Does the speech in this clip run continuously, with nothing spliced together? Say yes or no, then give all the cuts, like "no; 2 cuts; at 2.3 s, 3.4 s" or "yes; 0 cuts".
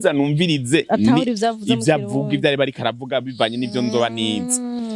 yes; 0 cuts